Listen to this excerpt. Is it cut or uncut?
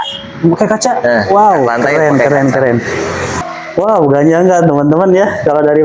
cut